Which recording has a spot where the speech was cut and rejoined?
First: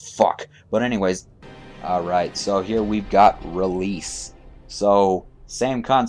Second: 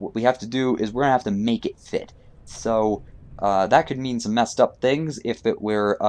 first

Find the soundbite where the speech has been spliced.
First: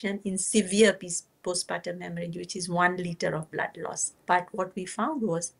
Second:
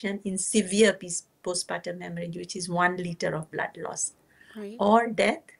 first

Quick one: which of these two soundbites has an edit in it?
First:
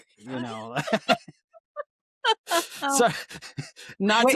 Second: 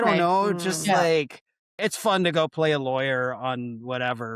second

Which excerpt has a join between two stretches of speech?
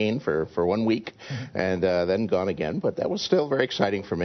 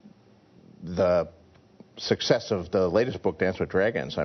first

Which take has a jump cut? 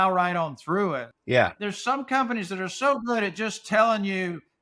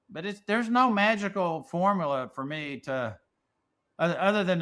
first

